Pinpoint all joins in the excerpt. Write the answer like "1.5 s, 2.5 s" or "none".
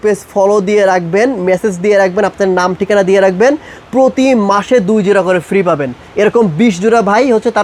none